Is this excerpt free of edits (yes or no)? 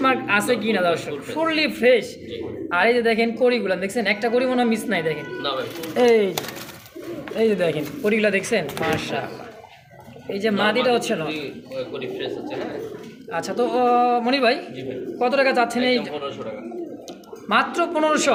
yes